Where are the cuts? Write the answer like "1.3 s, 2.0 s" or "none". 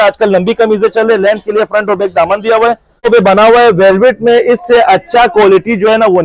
3.1 s